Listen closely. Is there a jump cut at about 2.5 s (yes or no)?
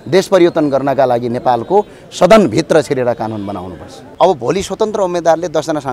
no